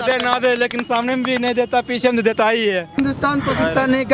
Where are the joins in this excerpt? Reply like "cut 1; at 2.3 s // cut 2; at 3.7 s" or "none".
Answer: none